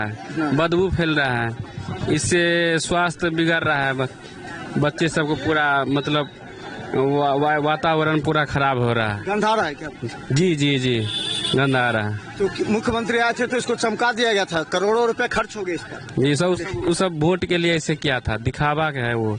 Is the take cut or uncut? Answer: uncut